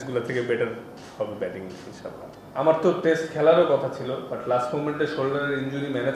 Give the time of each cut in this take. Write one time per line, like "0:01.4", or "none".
0:02.3